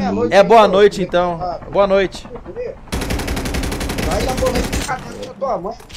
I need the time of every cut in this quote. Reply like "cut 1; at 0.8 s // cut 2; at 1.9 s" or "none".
cut 1; at 4.0 s